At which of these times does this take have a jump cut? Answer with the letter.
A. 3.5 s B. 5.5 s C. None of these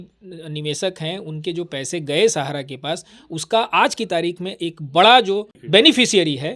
B